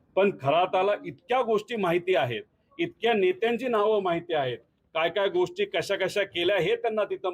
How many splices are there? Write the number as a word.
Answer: one